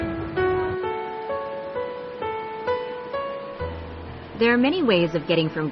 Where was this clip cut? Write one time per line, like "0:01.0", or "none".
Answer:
0:03.5

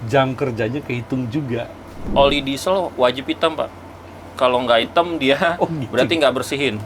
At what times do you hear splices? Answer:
0:02.1

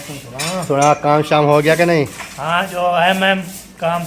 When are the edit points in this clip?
none

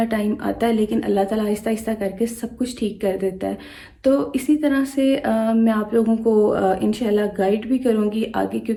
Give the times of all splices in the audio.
none

